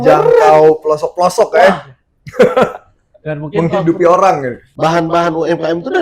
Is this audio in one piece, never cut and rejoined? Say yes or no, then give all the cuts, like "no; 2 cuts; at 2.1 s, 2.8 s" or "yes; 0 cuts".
no; 1 cut; at 4.7 s